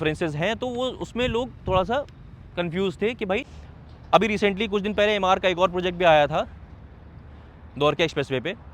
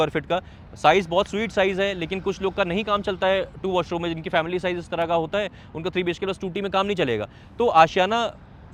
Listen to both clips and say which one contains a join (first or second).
first